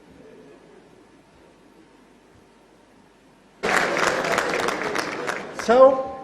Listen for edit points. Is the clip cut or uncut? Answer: cut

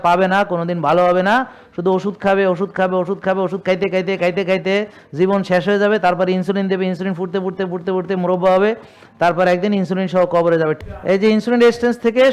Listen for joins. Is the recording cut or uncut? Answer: cut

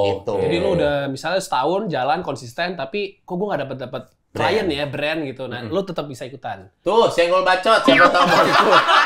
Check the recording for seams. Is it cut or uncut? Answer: uncut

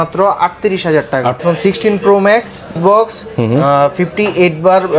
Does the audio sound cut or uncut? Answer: cut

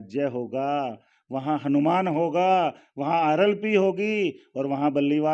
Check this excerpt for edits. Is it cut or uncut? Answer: uncut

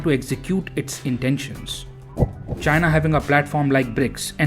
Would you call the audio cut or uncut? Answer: cut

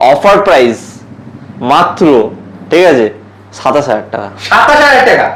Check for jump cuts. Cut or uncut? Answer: uncut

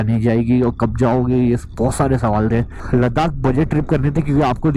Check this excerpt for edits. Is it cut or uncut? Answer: cut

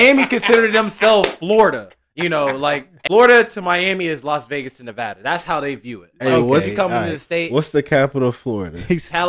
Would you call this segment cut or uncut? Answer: cut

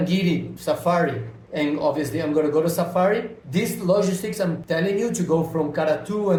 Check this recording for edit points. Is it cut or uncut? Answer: uncut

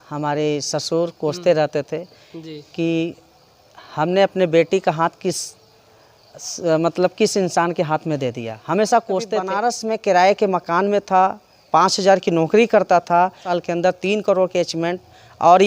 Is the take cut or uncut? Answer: cut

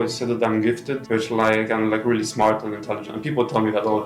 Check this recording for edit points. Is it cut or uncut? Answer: uncut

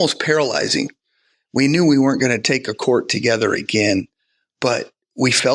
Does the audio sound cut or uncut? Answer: cut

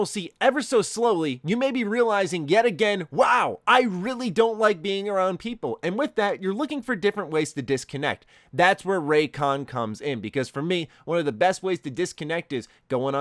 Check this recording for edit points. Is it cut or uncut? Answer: uncut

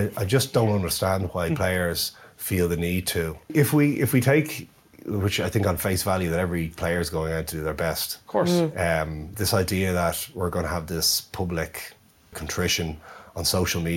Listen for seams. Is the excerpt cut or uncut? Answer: cut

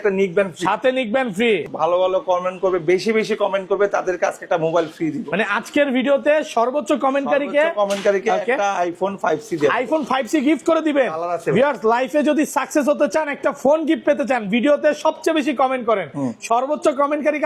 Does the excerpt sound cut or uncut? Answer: cut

